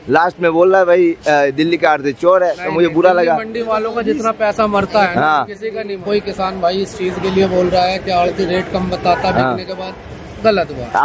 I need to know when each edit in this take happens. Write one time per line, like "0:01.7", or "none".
0:06.0

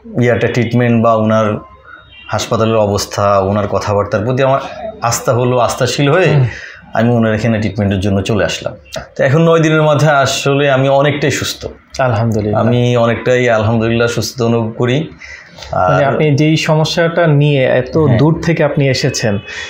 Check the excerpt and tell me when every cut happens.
0:09.0

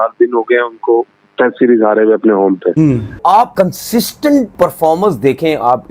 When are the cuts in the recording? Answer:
0:03.2

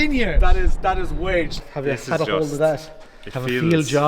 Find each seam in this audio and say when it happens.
0:01.6

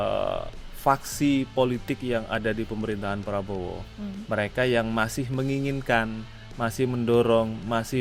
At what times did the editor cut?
none

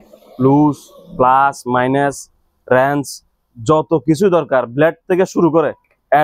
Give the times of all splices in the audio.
none

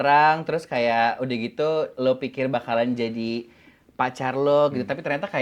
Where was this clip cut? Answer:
none

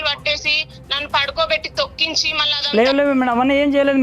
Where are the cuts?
0:02.4

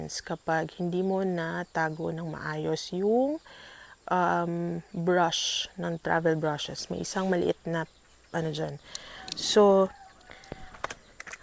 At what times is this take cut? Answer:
none

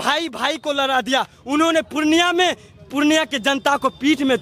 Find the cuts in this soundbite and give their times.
none

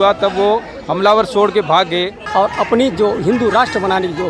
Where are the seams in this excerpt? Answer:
0:02.2

